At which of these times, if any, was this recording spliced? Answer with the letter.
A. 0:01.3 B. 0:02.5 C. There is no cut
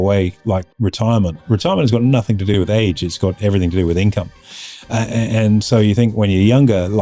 B